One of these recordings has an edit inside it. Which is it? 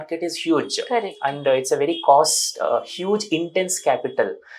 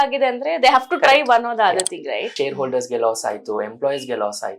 second; 1 cut; at 2.3 s

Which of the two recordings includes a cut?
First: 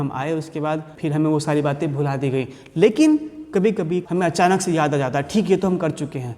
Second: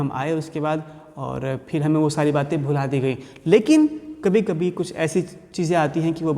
first; 2 cuts; at 0.9 s, 4.0 s

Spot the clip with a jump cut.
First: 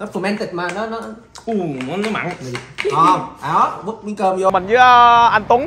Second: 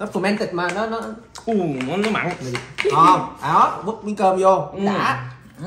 first; 1 cut; at 4.5 s

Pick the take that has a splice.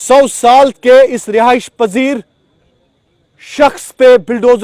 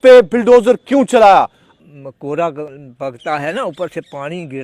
second; 1 cut; at 1.7 s

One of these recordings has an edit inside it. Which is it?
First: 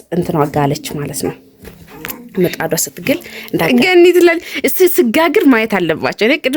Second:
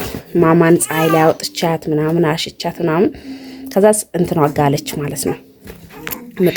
first; 1 cut; at 3.7 s

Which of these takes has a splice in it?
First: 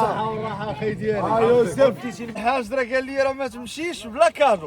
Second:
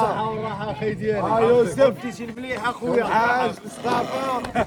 first; 1 cut; at 2.4 s

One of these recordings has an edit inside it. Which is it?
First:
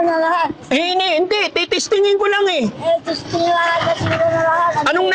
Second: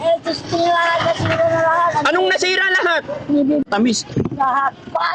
second; 1 cut; at 3.7 s

